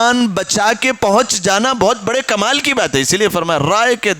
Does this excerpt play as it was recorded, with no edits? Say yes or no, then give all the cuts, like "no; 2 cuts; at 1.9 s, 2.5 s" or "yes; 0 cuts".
yes; 0 cuts